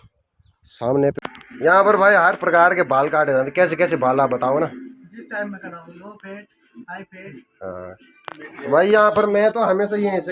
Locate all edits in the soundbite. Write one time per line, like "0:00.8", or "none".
0:01.2